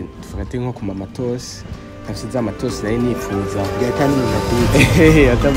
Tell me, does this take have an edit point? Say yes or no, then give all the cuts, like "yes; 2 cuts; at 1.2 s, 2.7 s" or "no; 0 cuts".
no; 0 cuts